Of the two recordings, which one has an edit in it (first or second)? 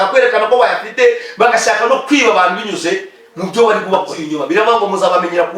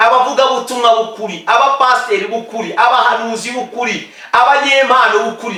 first